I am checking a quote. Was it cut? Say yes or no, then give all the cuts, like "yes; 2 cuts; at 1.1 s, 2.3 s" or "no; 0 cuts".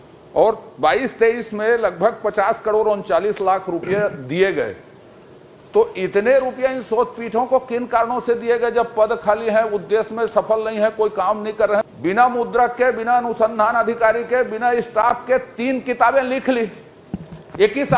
yes; 1 cut; at 11.9 s